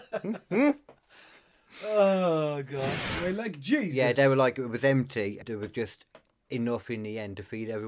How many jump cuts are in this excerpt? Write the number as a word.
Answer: two